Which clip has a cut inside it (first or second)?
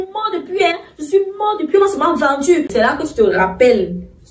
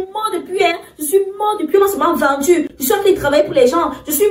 first